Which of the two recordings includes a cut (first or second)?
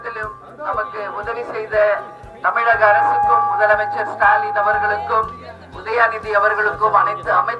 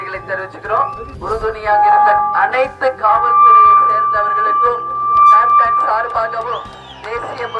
second